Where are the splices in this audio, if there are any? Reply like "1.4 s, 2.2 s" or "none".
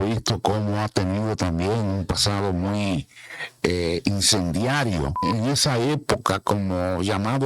5.2 s